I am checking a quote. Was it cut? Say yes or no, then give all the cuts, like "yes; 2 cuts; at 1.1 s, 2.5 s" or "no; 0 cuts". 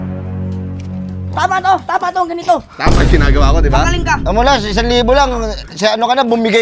no; 0 cuts